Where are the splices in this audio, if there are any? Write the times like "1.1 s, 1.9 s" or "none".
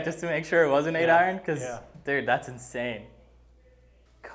none